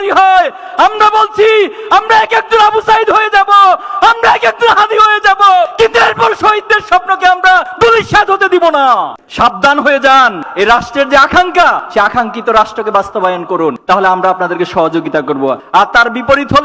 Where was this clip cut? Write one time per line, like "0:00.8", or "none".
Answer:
0:09.2
0:10.4